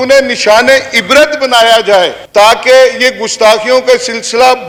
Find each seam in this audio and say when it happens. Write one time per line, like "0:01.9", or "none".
none